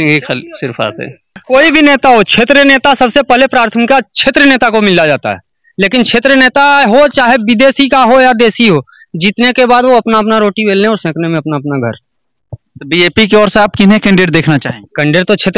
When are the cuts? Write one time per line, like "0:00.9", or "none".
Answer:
0:01.4